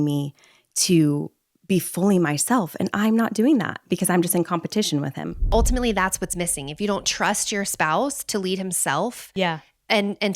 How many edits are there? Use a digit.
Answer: 1